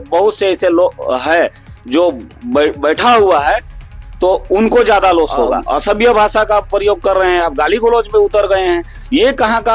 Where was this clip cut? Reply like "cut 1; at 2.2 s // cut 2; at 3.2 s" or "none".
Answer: cut 1; at 5.6 s